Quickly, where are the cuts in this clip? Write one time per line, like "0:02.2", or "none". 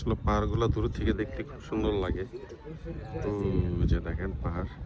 none